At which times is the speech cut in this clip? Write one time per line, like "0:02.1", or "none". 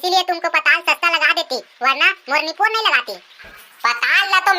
0:03.5